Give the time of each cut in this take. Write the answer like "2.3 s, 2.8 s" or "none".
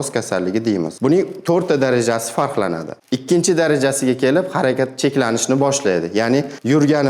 3.0 s